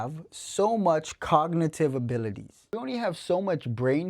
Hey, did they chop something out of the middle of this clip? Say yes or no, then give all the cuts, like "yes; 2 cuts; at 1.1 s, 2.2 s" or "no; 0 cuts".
yes; 1 cut; at 2.8 s